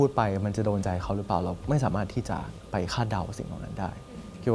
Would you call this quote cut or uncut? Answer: cut